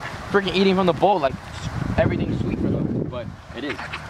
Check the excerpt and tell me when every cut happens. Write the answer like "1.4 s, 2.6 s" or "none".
none